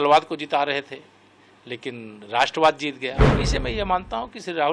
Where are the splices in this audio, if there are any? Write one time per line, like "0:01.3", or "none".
0:03.3